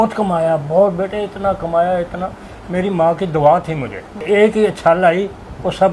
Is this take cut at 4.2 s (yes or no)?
yes